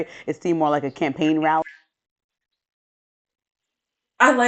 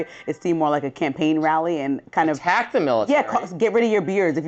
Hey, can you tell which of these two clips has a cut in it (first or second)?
second